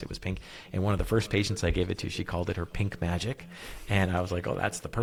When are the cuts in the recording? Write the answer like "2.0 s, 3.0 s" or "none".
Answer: none